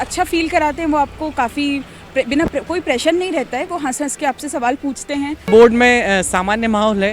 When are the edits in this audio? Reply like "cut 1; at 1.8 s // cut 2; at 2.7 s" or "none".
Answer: cut 1; at 5.4 s